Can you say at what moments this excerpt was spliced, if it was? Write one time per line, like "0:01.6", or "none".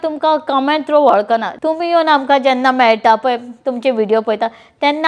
0:01.5